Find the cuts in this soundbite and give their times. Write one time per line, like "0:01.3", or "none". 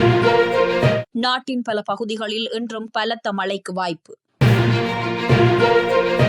0:01.1